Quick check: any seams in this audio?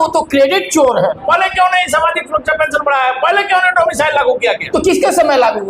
yes; 2 cuts; at 1.2 s, 4.6 s

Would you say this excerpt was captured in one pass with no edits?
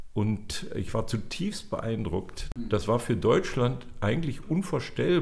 no; 1 cut; at 2.7 s

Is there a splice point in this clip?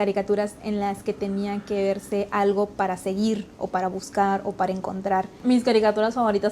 yes; 1 cut; at 5.3 s

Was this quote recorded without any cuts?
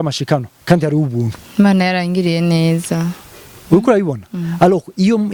yes; 0 cuts

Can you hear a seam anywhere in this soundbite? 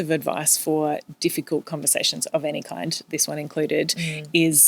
no; 0 cuts

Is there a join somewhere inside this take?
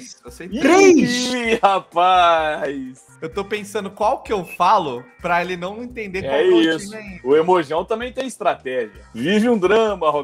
yes; 2 cuts; at 3.2 s, 9.0 s

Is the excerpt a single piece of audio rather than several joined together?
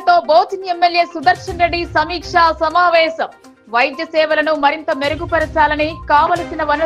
yes; 0 cuts

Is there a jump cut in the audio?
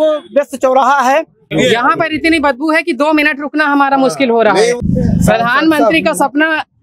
yes; 2 cuts; at 1.5 s, 4.8 s

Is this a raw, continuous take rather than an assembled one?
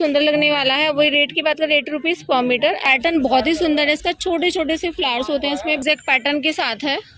no; 2 cuts; at 2.8 s, 5.8 s

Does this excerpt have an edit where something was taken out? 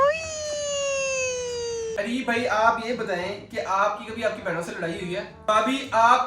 yes; 2 cuts; at 1.9 s, 5.3 s

